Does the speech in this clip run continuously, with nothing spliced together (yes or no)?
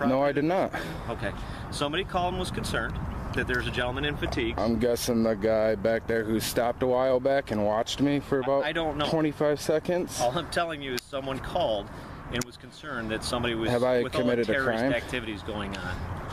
yes